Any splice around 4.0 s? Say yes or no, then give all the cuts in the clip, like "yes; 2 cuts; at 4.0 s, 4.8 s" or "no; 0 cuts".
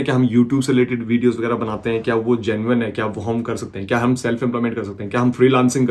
no; 0 cuts